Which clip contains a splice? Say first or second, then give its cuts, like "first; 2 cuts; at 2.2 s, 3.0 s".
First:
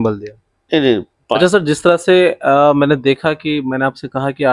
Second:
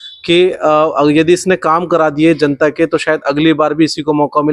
first; 1 cut; at 1.4 s